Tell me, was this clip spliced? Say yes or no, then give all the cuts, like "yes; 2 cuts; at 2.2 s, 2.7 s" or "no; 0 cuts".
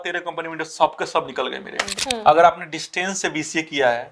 yes; 1 cut; at 1.9 s